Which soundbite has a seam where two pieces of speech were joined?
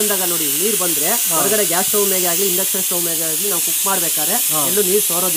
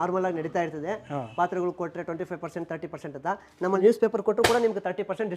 second; 1 cut; at 3.8 s

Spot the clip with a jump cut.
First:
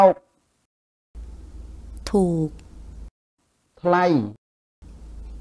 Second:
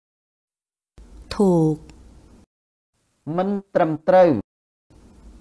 second; 1 cut; at 3.7 s

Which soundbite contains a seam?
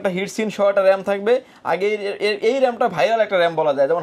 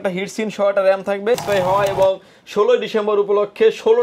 second; 1 cut; at 1.4 s

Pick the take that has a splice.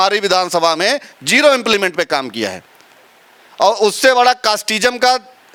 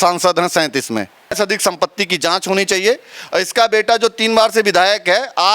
second; 1 cut; at 1.3 s

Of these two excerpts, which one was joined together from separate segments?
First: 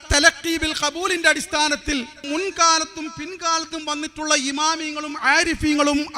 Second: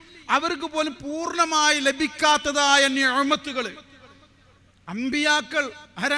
first; 1 cut; at 2.2 s

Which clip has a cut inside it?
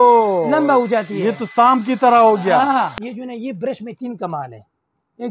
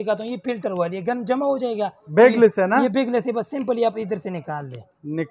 first; 1 cut; at 3.0 s

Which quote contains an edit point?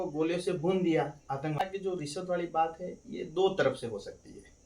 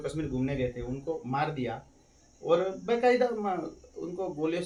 first; 1 cut; at 1.6 s

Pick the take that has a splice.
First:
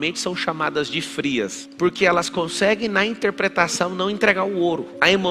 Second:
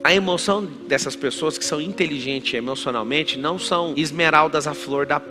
first; 1 cut; at 1.6 s

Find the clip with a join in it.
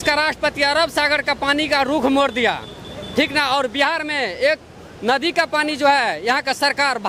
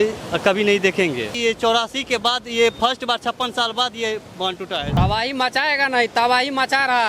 second; 2 cuts; at 1.3 s, 4.9 s

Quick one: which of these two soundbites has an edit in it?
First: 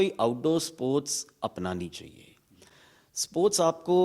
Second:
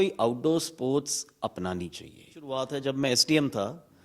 second; 1 cut; at 2.5 s

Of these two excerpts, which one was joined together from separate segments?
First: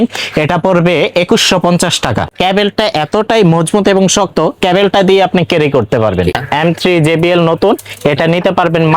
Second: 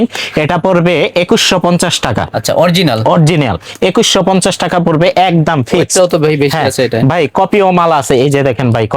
first; 2 cuts; at 2.3 s, 6.4 s

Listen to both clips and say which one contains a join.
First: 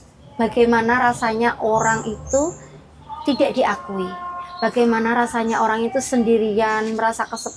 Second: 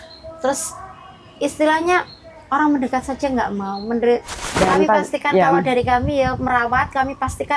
second; 1 cut; at 4.4 s

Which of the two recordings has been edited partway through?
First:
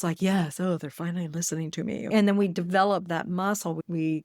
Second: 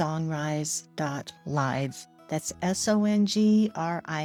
first; 1 cut; at 2.1 s

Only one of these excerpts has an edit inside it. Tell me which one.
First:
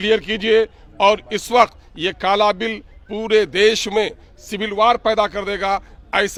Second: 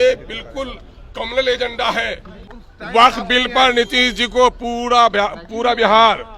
second; 1 cut; at 2.5 s

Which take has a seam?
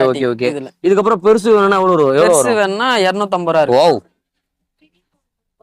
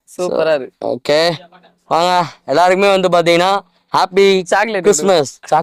first; 1 cut; at 3.5 s

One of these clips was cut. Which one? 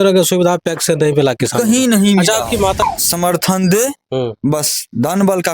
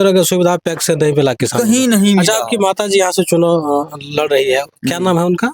first; 1 cut; at 2.8 s

